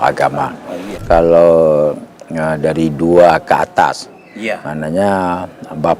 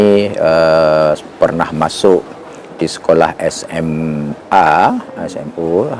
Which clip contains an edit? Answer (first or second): first